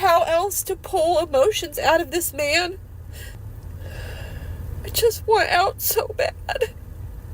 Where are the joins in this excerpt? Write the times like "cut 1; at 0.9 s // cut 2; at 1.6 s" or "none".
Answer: cut 1; at 3.4 s